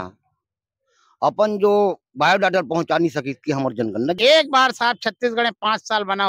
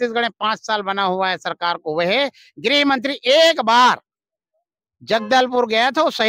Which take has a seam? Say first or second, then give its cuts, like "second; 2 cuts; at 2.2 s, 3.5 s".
first; 1 cut; at 4.2 s